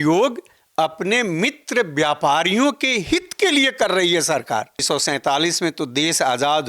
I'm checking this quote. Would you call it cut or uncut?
cut